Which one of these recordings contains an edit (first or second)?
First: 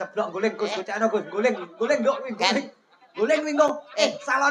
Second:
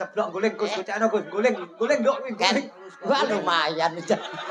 second